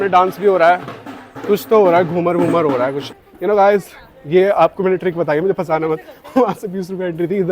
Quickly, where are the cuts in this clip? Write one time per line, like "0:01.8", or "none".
0:03.1